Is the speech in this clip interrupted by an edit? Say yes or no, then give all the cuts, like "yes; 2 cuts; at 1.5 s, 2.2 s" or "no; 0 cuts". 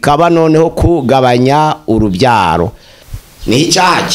yes; 1 cut; at 2.9 s